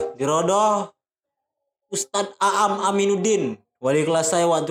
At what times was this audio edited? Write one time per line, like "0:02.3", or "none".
none